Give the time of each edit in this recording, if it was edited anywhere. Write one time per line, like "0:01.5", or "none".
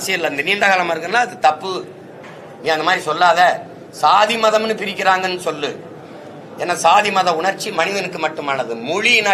none